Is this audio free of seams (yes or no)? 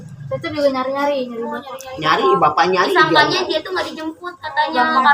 yes